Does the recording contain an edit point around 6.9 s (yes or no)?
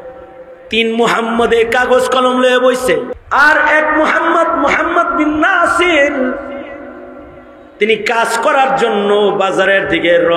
no